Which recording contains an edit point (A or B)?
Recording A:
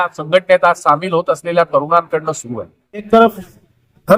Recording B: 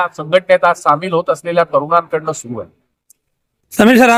A